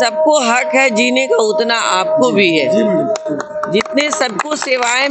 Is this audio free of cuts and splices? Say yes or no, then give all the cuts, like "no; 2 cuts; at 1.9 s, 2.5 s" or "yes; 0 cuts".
yes; 0 cuts